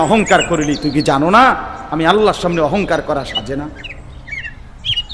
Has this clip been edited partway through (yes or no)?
yes